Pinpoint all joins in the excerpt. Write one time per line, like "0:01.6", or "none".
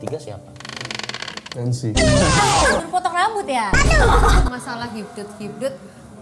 0:01.5
0:02.8
0:04.4

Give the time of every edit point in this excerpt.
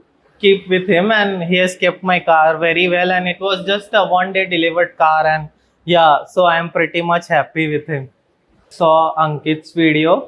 0:08.7

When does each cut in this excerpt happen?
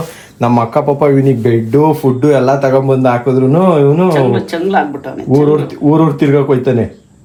none

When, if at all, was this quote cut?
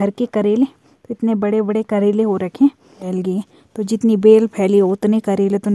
0:03.0

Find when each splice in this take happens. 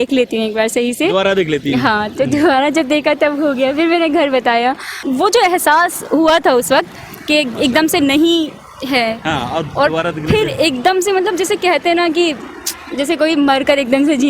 0:04.9

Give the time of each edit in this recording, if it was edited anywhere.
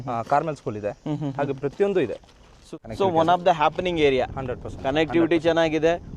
0:02.8

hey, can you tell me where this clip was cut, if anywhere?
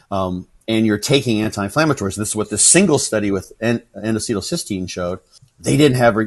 0:05.3

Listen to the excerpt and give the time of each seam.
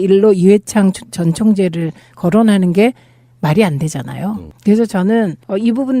0:00.9

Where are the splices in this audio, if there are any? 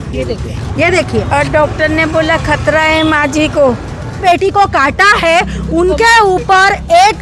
0:04.2

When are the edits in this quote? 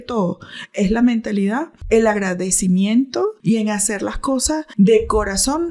0:01.8
0:03.4
0:04.7

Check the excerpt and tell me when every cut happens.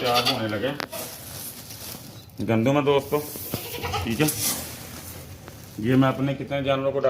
0:01.0

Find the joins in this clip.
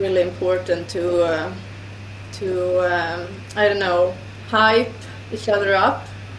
none

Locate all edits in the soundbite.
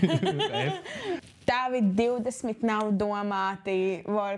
0:01.2

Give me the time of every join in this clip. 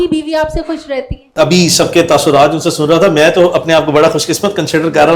0:01.1

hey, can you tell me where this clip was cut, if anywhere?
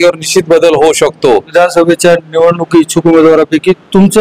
0:01.5

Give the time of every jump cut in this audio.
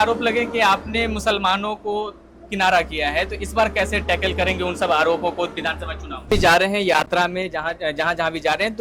0:06.3

